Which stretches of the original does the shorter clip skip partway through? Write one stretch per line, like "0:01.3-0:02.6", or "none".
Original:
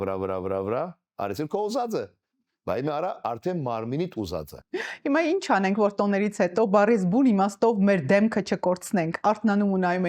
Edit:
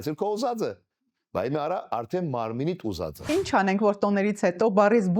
0:04.6-0:05.3